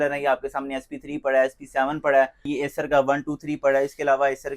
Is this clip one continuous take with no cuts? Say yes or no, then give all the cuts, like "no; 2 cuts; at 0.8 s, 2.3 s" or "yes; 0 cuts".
no; 1 cut; at 2.5 s